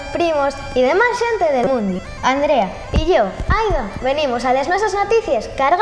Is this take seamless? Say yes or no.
no